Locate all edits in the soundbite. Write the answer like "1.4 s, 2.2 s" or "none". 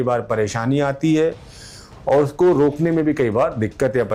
none

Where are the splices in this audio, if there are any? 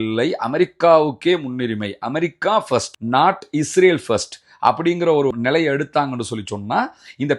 none

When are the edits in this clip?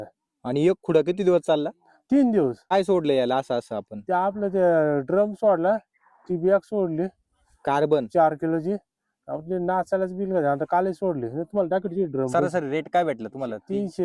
2.7 s, 12.3 s

